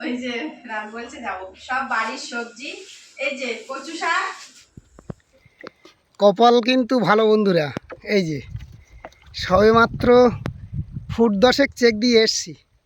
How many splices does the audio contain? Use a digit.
1